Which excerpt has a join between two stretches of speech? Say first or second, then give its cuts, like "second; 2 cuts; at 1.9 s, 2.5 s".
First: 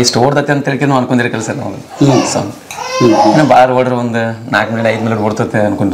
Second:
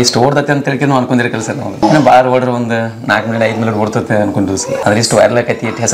second; 2 cuts; at 1.8 s, 4.8 s